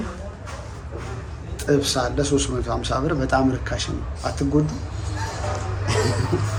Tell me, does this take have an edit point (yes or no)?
no